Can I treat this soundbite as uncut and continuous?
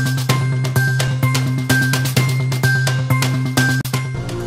yes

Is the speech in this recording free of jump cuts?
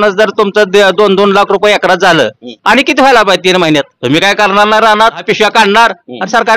no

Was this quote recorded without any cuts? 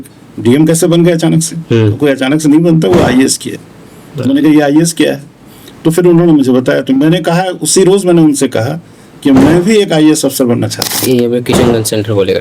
no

